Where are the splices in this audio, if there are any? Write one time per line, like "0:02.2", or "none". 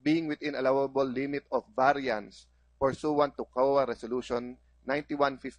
0:04.0